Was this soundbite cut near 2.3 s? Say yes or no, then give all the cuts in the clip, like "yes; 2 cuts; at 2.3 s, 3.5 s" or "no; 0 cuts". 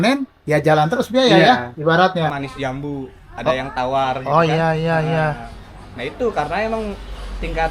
yes; 1 cut; at 2.3 s